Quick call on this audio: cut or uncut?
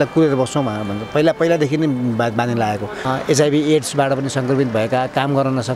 cut